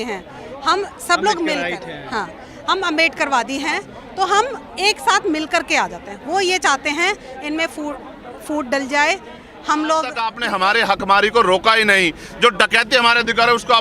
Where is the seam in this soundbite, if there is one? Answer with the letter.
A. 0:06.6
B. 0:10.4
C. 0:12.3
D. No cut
B